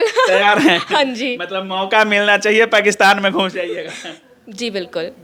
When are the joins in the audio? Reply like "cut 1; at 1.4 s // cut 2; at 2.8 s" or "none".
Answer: none